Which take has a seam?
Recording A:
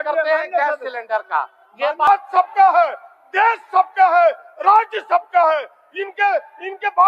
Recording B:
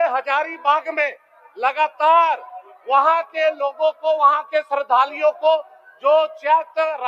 A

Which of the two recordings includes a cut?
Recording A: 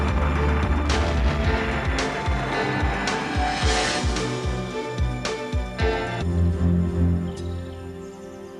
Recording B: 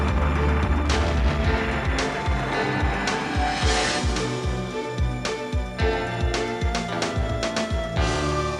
B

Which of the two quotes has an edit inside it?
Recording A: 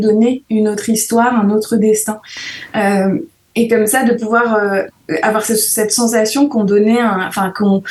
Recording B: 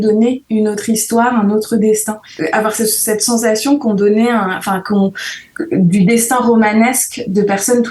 B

